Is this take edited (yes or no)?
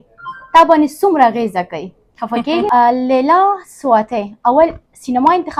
yes